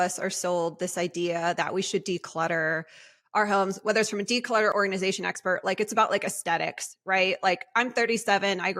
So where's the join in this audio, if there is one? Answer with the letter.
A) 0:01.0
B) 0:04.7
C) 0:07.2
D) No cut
B